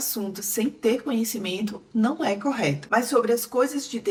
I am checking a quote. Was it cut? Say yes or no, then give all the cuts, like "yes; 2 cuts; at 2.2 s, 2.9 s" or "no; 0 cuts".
no; 0 cuts